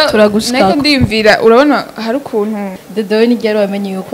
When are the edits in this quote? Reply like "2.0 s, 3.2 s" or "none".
2.8 s